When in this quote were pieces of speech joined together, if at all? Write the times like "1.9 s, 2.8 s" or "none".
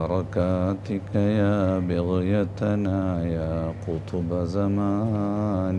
none